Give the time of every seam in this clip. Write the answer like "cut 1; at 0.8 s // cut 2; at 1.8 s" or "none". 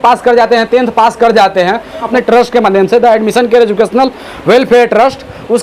cut 1; at 2.1 s